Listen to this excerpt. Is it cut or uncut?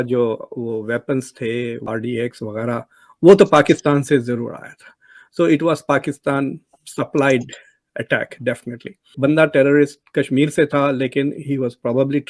uncut